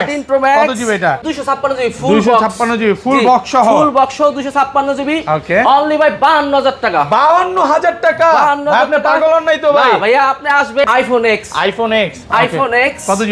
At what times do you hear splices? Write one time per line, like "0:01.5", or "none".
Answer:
0:01.3
0:10.8